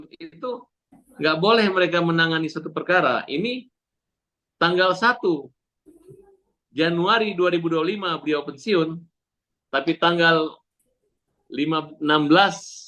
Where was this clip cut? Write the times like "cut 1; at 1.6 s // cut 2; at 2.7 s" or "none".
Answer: none

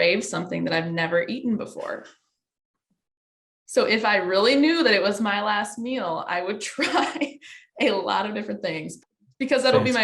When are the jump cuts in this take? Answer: cut 1; at 9.0 s

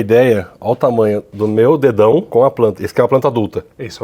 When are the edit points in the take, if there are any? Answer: cut 1; at 2.3 s

